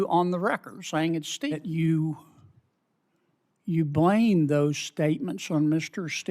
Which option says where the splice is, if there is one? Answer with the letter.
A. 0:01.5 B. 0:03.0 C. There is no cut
A